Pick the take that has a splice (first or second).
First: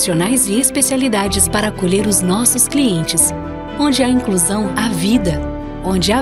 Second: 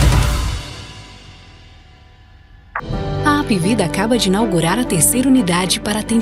second